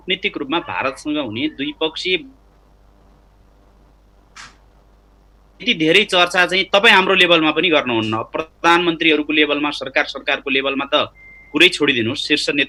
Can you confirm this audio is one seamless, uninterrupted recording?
yes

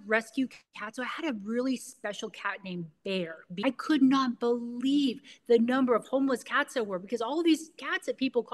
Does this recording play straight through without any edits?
no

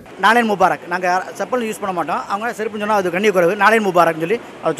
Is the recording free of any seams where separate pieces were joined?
yes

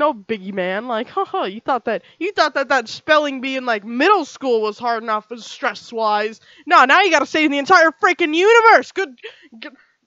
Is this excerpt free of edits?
yes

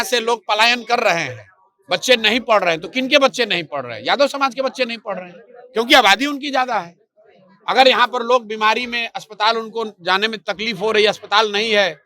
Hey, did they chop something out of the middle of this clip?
no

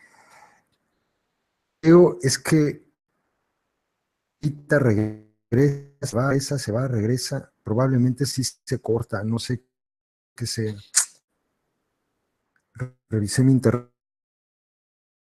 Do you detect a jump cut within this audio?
no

